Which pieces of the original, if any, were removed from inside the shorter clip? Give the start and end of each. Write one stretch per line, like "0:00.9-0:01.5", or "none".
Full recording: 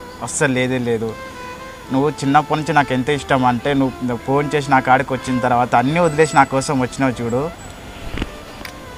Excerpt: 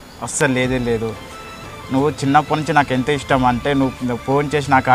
none